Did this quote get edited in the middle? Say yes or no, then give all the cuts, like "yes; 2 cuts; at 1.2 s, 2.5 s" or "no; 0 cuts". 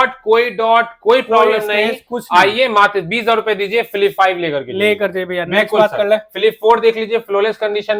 no; 0 cuts